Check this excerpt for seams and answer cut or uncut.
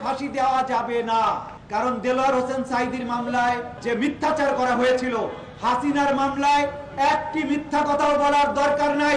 cut